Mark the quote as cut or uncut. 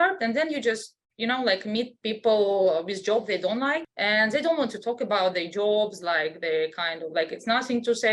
cut